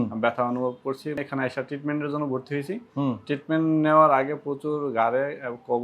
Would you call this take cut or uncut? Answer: cut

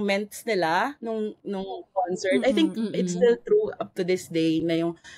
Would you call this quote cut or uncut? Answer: uncut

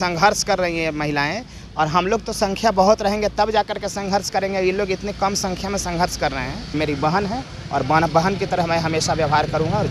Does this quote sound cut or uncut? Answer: cut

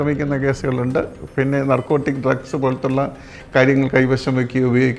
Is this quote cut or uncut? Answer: uncut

